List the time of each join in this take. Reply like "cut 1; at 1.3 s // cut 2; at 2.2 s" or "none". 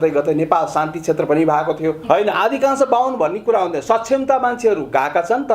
cut 1; at 2.0 s